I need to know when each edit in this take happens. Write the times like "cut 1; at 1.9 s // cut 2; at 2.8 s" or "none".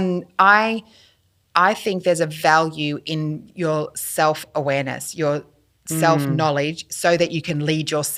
none

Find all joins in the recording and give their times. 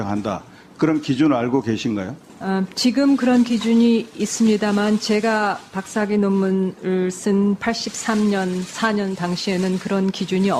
none

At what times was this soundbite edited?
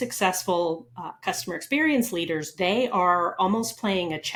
none

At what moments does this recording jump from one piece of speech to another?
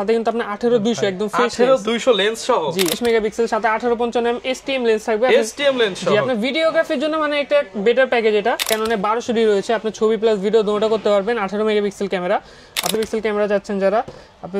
cut 1; at 3.0 s // cut 2; at 8.7 s // cut 3; at 12.9 s

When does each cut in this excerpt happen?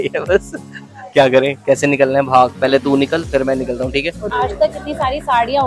cut 1; at 4.3 s

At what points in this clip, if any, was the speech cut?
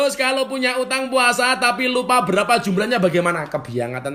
none

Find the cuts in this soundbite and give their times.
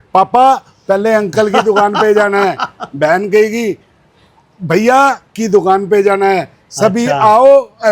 none

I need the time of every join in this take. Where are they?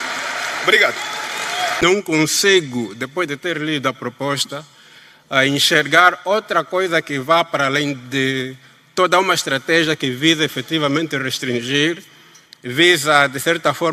cut 1; at 1.8 s

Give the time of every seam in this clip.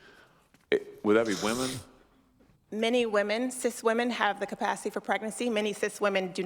cut 1; at 3.8 s // cut 2; at 5.3 s

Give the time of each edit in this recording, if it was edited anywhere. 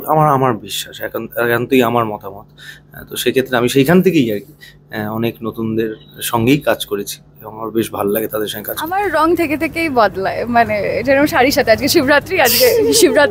cut 1; at 8.8 s

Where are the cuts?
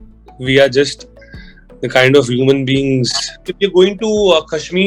cut 1; at 3.4 s

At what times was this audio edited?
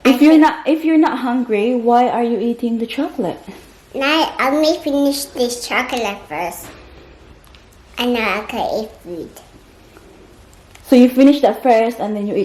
none

